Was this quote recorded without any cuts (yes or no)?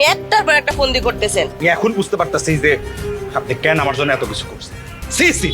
no